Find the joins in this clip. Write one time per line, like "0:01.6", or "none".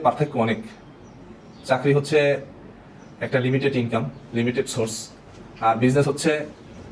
none